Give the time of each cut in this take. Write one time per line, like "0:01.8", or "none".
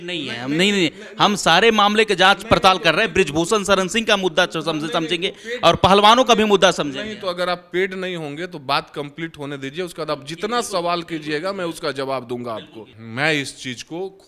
0:12.9